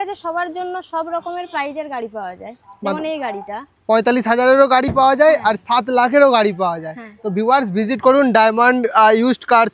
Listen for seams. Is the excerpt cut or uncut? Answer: uncut